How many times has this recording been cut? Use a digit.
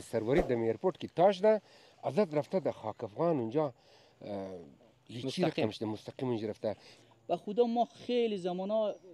1